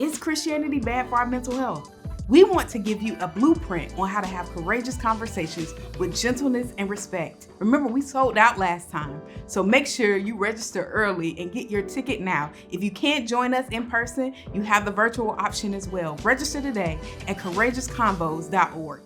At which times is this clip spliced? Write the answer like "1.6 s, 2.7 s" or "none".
16.1 s